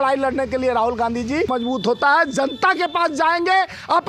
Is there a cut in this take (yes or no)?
yes